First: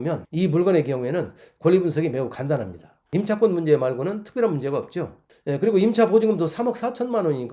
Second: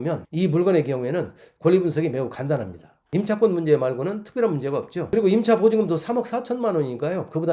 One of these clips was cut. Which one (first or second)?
second